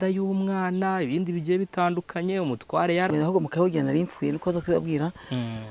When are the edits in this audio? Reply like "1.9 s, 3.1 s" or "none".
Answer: 3.1 s